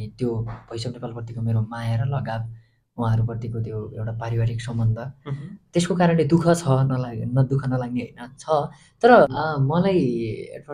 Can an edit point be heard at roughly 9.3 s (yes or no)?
yes